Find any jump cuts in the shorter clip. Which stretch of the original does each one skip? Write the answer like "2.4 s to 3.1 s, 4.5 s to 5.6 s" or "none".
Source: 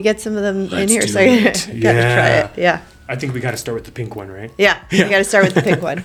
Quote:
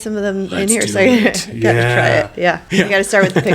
2.8 s to 4.8 s